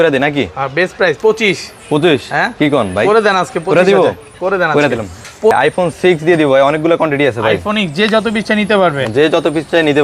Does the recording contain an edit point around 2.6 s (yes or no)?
no